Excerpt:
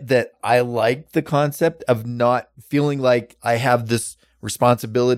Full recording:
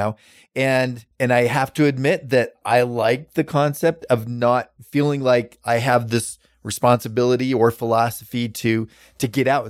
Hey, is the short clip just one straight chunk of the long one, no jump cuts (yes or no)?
yes